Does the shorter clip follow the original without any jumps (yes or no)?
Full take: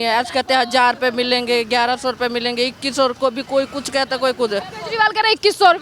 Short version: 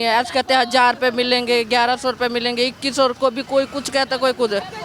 yes